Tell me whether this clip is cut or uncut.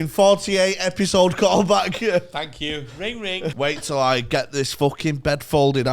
cut